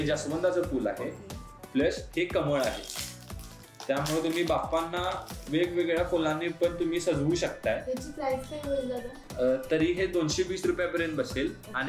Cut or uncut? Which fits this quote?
uncut